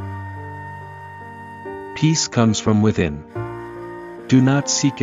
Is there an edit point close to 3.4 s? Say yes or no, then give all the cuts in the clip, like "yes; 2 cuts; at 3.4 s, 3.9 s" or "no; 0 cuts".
no; 1 cut; at 1.1 s